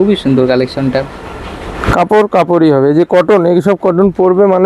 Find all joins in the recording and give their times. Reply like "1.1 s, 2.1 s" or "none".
1.8 s